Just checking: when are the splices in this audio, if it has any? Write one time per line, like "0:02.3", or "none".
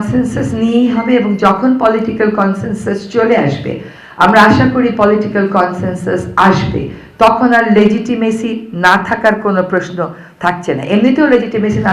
none